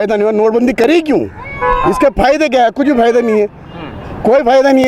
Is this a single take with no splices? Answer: yes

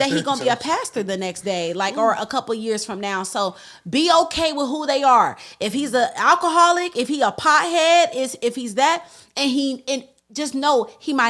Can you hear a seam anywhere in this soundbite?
no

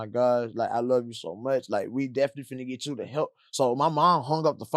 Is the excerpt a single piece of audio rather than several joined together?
yes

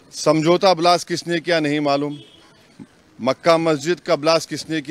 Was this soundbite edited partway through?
no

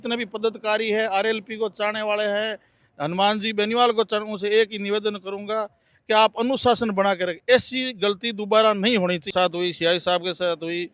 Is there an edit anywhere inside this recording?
yes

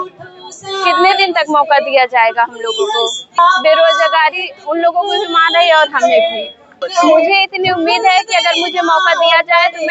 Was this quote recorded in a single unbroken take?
no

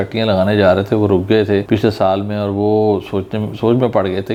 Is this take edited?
no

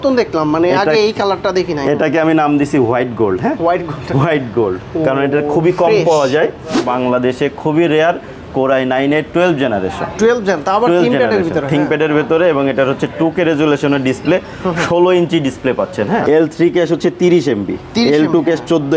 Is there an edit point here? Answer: yes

